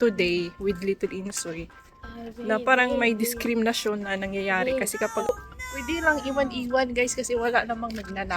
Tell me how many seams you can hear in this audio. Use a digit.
1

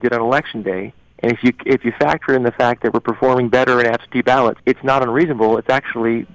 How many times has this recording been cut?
1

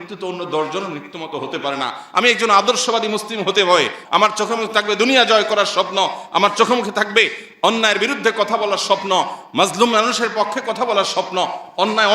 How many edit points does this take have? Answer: 1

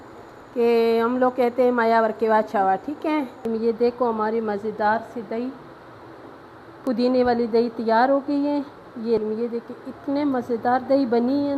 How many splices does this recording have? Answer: 2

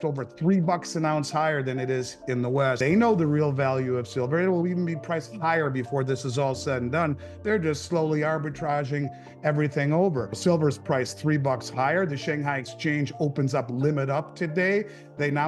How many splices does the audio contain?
2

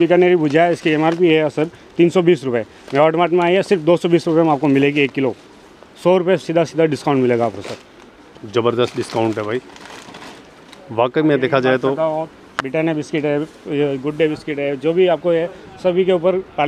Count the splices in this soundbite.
0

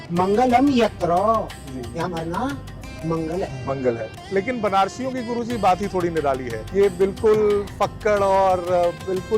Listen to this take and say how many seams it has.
2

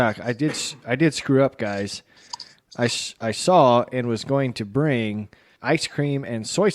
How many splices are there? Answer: 1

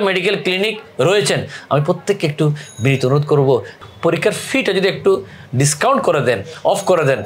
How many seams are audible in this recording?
1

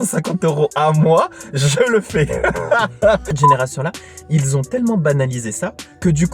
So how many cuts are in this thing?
1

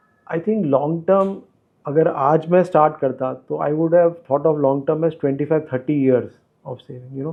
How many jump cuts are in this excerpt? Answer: 0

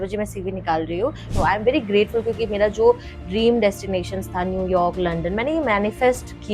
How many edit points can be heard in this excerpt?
1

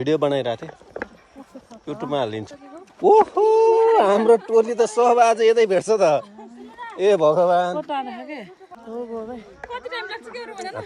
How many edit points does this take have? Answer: 2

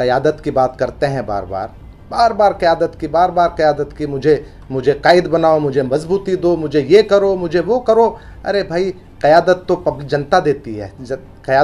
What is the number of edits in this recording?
0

